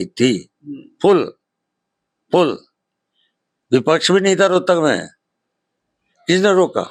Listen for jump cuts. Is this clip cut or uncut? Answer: uncut